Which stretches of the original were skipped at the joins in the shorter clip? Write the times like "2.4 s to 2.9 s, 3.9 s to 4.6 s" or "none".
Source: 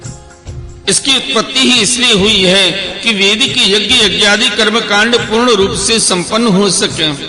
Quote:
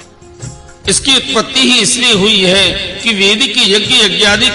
none